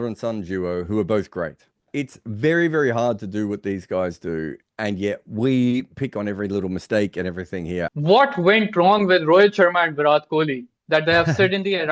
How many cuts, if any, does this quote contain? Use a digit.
2